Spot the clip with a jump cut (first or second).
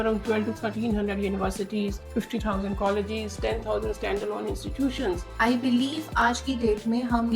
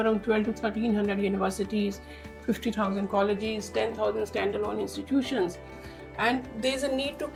first